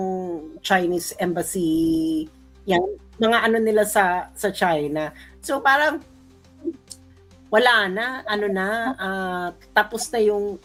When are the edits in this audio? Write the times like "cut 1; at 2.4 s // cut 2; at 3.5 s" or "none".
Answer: none